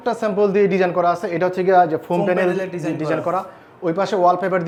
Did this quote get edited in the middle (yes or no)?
no